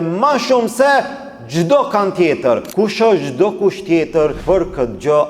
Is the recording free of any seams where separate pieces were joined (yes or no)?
no